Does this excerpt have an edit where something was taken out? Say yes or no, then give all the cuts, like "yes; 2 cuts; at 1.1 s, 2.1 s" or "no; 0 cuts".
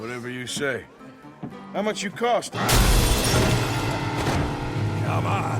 yes; 1 cut; at 2.5 s